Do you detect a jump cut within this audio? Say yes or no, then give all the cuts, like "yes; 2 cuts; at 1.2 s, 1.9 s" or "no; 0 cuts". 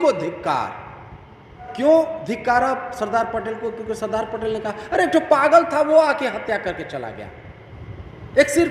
yes; 1 cut; at 1.6 s